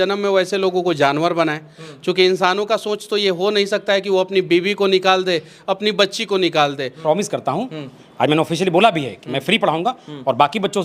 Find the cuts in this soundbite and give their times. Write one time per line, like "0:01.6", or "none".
0:06.9

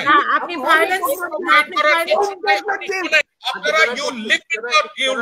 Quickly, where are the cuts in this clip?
0:03.4

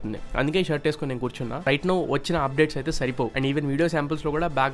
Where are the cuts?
0:01.6

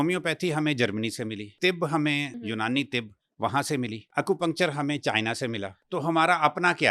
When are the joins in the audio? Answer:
0:01.5
0:02.3
0:04.0
0:05.7

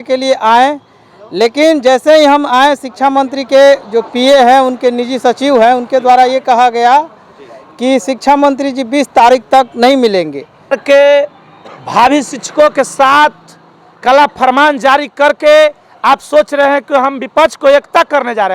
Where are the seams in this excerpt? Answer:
0:10.8

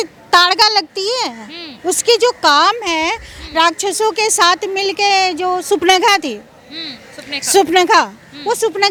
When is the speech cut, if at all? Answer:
none

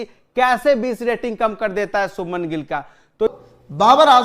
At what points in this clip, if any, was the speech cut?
0:03.3

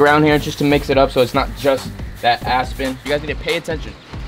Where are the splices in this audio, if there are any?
0:03.0

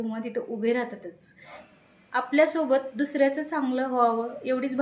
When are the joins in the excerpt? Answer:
0:01.7

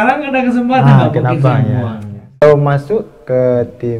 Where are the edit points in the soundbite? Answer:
0:02.4

